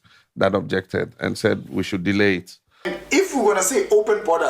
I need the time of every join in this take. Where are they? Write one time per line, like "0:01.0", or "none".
0:03.0